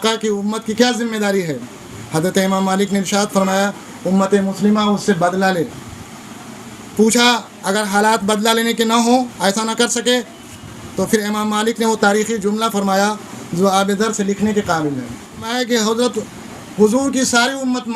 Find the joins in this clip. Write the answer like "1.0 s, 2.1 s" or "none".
15.4 s